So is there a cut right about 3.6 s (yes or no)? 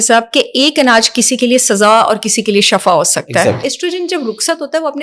yes